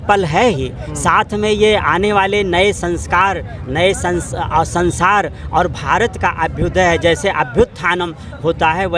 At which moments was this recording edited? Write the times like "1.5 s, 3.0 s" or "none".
none